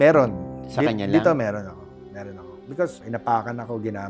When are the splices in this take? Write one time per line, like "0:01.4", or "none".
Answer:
0:03.0